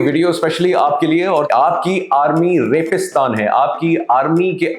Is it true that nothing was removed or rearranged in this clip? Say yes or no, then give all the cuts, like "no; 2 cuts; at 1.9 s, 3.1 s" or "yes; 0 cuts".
no; 1 cut; at 1.5 s